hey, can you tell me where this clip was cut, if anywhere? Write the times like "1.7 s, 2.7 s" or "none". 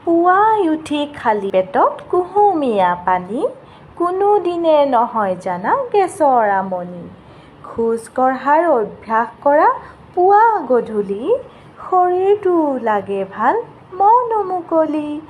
1.5 s